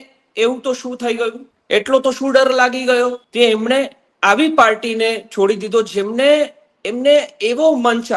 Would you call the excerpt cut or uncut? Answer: cut